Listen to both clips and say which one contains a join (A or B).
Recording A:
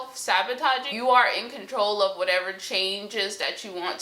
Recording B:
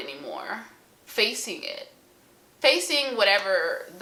A